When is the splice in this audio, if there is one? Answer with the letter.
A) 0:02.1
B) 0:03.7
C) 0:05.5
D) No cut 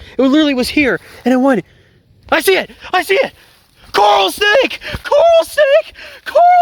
D